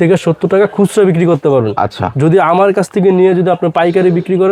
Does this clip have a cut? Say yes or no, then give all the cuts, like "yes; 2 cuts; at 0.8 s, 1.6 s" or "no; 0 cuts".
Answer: no; 0 cuts